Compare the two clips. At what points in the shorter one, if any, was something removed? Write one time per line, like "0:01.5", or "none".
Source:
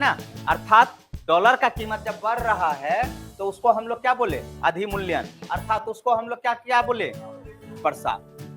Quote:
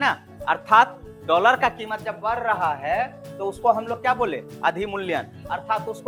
none